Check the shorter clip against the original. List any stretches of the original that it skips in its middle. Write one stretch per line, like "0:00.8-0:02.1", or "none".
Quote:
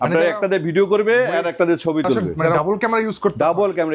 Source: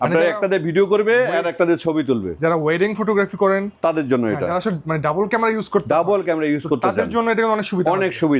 0:02.6-0:05.1